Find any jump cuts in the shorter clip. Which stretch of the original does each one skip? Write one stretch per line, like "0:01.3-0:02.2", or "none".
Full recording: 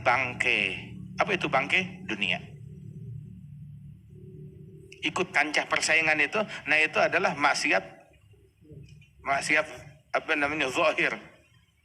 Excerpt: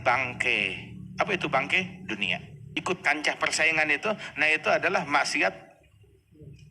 0:02.6-0:04.9